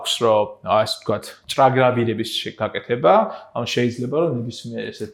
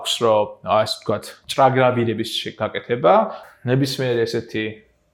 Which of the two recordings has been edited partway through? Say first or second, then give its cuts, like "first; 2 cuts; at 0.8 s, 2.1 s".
second; 1 cut; at 3.5 s